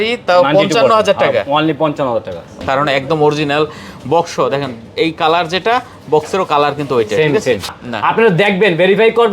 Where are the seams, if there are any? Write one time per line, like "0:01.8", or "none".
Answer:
0:02.6
0:07.8